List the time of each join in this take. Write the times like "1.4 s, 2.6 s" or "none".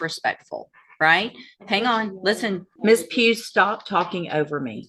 2.7 s